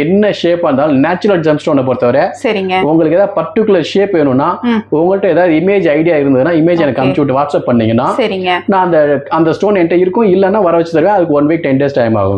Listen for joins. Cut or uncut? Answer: uncut